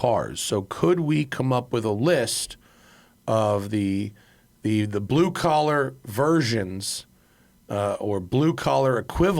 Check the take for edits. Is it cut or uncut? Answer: uncut